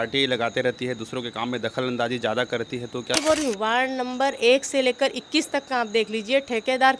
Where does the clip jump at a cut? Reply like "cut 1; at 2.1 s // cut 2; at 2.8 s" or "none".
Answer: cut 1; at 3.1 s